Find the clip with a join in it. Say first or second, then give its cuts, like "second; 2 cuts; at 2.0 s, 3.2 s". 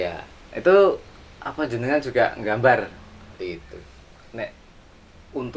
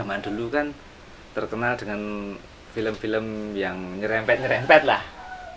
first; 1 cut; at 3.4 s